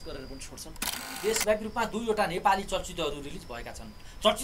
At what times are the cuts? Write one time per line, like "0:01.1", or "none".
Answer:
0:01.1